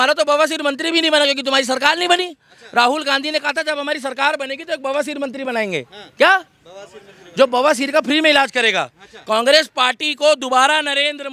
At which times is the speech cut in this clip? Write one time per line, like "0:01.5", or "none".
none